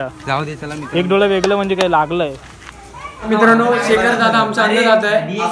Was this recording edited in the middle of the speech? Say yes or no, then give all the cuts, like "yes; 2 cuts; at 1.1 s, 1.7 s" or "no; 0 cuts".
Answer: yes; 1 cut; at 3.3 s